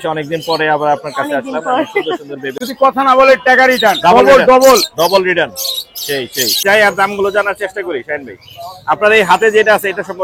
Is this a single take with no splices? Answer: no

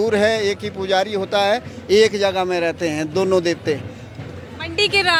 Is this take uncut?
yes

